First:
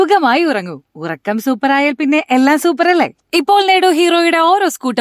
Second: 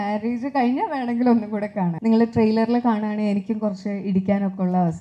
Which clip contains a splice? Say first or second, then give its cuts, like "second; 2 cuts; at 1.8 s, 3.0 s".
second; 1 cut; at 1.9 s